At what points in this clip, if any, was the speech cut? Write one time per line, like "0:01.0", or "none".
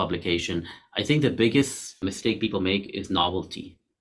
none